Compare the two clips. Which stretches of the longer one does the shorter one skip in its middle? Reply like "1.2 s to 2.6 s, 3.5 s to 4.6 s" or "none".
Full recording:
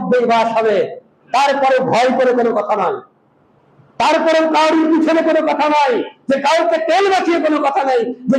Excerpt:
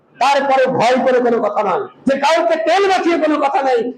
3.1 s to 6.1 s